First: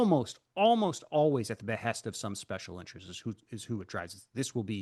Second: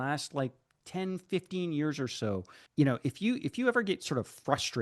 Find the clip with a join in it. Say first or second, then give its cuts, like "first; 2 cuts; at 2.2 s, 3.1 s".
second; 1 cut; at 2.6 s